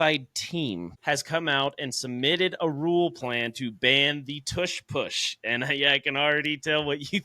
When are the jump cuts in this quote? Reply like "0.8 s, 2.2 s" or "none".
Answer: 0.9 s